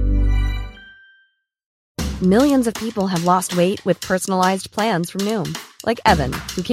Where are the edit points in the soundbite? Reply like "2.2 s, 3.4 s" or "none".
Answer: 1.8 s

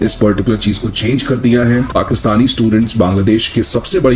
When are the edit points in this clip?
1.9 s

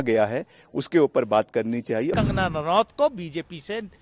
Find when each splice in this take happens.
2.1 s

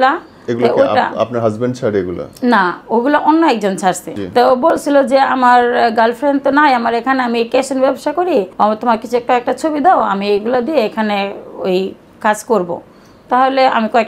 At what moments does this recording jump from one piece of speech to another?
4.1 s, 8.5 s

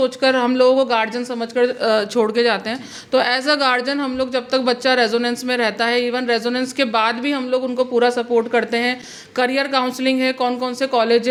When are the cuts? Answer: none

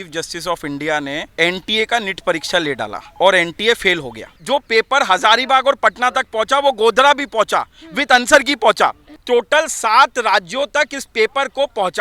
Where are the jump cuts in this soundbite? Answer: 1.3 s, 3.0 s, 4.3 s, 9.1 s

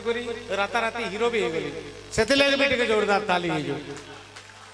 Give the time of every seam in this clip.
none

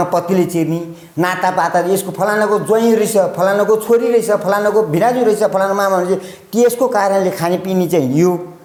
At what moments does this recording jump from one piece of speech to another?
none

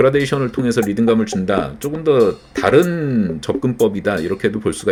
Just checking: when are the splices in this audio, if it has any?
none

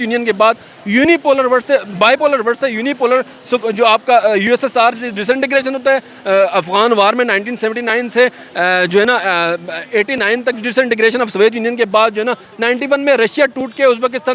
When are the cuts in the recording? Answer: none

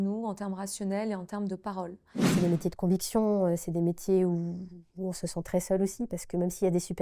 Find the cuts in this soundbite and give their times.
2.3 s

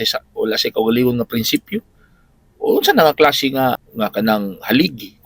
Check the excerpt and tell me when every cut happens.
3.9 s

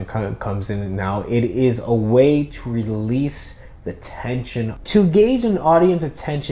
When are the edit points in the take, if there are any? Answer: 4.7 s

